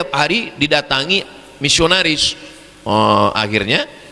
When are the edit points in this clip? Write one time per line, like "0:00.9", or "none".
none